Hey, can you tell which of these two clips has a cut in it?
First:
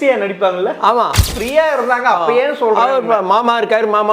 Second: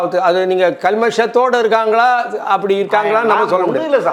first; 1 cut; at 1.4 s

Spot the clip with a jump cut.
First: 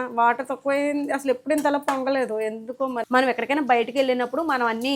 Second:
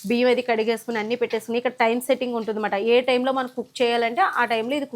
first; 1 cut; at 3.0 s

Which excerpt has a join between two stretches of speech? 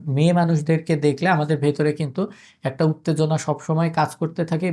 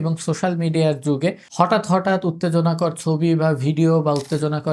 second; 1 cut; at 1.4 s

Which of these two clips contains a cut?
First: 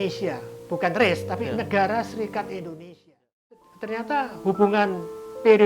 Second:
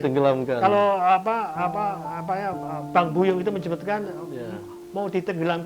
first; 1 cut; at 3.6 s

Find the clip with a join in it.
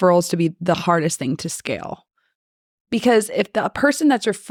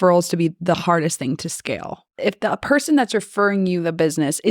second; 1 cut; at 2.2 s

